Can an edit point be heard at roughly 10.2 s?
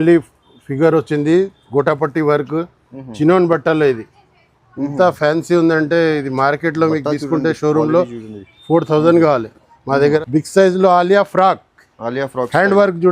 yes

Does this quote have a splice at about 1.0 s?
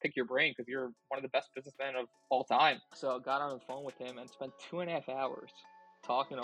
no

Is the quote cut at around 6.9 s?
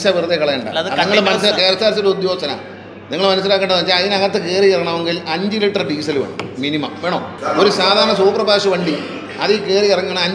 no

